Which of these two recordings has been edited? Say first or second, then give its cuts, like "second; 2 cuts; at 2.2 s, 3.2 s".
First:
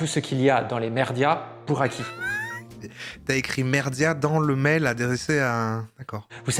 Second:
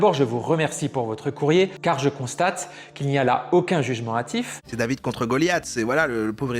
second; 1 cut; at 4.6 s